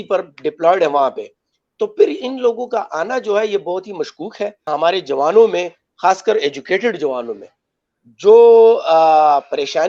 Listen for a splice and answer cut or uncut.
cut